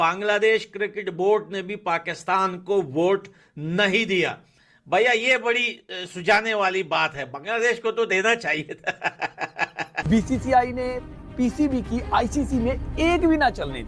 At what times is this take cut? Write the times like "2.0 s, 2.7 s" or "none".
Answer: 10.0 s